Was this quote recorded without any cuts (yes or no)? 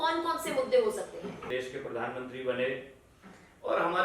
no